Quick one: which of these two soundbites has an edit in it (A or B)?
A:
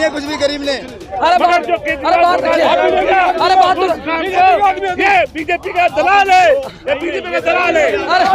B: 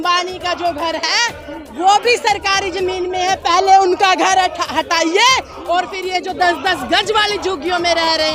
A